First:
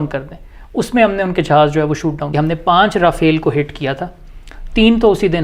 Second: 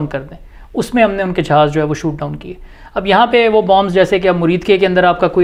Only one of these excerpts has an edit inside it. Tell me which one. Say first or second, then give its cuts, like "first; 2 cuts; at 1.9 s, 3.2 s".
first; 1 cut; at 2.3 s